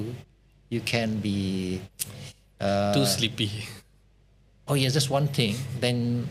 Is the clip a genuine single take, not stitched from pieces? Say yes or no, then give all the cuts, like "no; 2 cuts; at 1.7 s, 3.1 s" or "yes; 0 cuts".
yes; 0 cuts